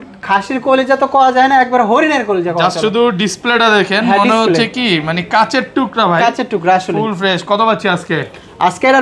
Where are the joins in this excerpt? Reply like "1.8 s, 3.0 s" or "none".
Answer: none